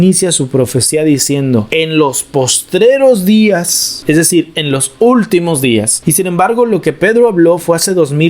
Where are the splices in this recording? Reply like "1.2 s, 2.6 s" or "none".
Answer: 6.0 s